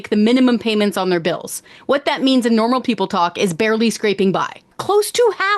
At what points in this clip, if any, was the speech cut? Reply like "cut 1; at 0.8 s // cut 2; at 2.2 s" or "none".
cut 1; at 4.7 s